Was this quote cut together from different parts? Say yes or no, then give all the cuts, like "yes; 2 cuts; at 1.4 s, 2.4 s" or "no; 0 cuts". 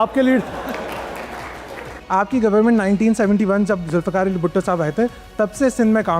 yes; 1 cut; at 2.0 s